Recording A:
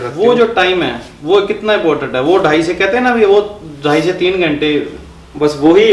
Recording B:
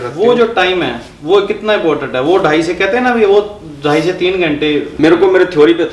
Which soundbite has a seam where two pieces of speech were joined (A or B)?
B